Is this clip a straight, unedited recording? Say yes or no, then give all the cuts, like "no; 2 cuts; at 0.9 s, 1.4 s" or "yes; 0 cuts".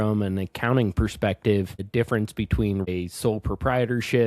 no; 2 cuts; at 1.8 s, 2.9 s